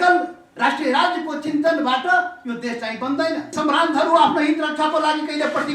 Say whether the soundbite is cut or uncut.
cut